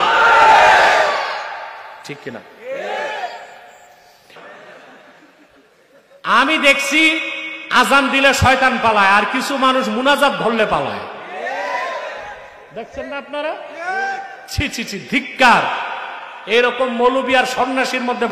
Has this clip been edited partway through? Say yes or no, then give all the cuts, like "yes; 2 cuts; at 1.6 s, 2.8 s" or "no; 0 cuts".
no; 0 cuts